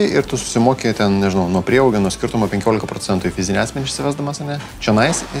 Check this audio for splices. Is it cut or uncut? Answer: uncut